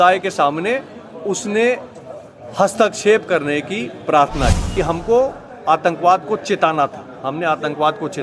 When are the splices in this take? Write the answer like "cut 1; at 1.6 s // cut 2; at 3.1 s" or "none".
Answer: cut 1; at 4.6 s